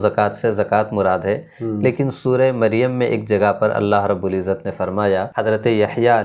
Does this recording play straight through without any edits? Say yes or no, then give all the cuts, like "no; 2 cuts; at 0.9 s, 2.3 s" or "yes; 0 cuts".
no; 1 cut; at 5.3 s